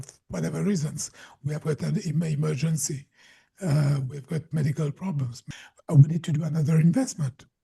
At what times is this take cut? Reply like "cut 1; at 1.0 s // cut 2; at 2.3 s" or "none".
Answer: cut 1; at 5.4 s